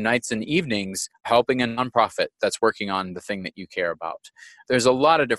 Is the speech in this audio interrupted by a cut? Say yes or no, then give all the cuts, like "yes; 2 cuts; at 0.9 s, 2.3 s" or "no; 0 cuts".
yes; 3 cuts; at 1.2 s, 2.4 s, 4.6 s